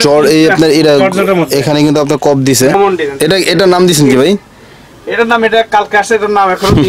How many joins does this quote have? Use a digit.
1